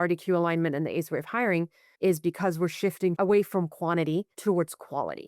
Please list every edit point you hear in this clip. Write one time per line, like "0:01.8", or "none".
0:01.8
0:03.1
0:04.3